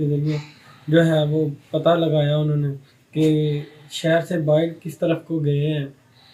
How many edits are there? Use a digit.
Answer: 0